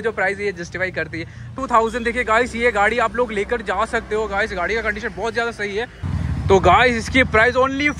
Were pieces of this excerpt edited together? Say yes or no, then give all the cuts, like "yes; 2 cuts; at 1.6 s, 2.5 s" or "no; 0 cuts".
yes; 2 cuts; at 1.5 s, 6.0 s